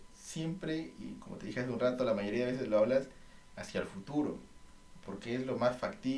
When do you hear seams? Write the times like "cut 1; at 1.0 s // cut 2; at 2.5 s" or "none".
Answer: none